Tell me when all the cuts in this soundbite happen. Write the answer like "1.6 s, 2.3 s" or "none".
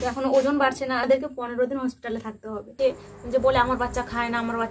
1.0 s, 2.7 s